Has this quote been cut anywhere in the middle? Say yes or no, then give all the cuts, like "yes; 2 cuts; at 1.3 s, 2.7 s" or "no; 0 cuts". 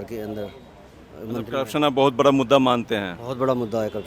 no; 0 cuts